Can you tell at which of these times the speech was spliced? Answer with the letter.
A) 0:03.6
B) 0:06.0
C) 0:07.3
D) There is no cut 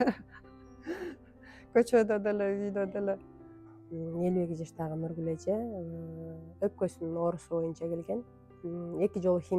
A